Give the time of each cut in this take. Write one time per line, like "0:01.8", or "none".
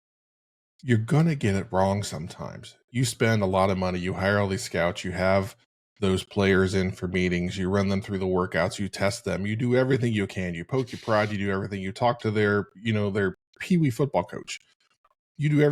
none

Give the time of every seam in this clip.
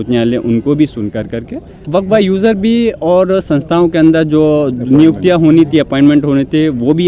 0:01.7

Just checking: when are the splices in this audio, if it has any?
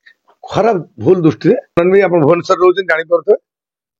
0:01.8

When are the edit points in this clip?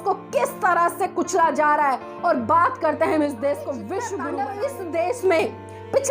0:04.2

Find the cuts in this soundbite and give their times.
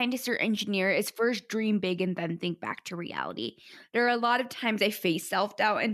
none

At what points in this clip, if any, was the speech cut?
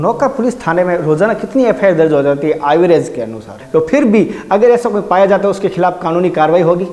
0:03.5

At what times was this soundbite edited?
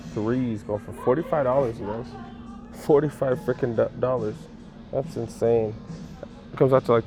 none

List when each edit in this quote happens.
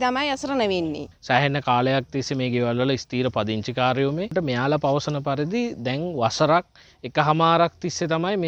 none

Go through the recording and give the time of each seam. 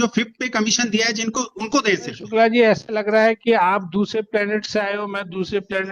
0:02.2

